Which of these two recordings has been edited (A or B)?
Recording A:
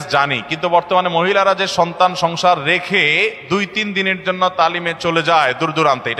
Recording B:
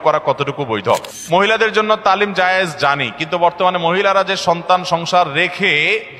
B